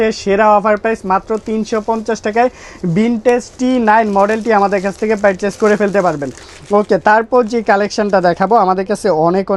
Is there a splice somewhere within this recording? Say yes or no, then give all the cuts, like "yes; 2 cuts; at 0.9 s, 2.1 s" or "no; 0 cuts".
no; 0 cuts